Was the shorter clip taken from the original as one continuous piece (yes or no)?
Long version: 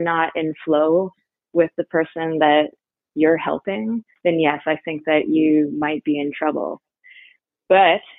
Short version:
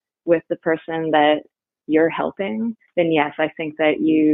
yes